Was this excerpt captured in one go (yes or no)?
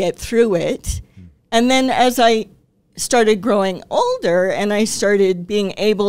yes